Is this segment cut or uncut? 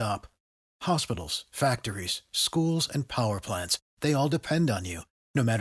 uncut